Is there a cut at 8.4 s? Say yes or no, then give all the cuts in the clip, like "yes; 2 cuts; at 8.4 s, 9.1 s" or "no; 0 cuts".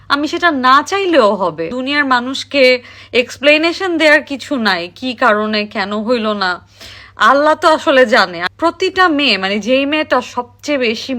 yes; 2 cuts; at 1.7 s, 8.4 s